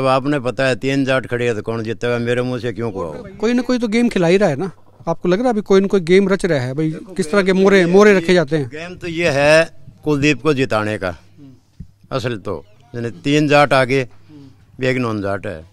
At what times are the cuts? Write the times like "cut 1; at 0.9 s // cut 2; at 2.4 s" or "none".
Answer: cut 1; at 3.2 s